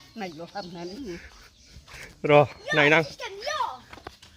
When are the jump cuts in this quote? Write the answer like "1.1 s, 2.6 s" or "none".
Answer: 1.0 s